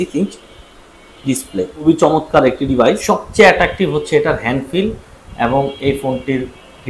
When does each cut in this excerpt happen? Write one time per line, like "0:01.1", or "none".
0:01.8
0:03.0